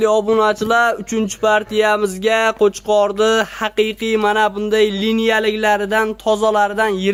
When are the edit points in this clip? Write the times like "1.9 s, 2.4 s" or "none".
none